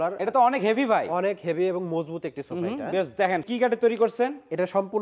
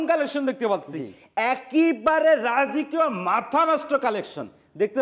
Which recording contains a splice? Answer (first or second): first